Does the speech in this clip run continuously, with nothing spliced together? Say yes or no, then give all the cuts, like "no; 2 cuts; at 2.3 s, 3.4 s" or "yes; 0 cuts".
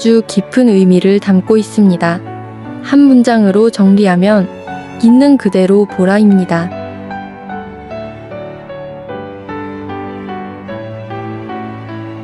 no; 1 cut; at 6.7 s